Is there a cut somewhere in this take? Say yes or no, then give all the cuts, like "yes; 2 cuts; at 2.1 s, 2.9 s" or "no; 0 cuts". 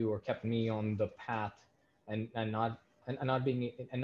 no; 0 cuts